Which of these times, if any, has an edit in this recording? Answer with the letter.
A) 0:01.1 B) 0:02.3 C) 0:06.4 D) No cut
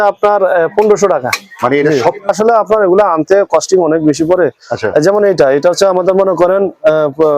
B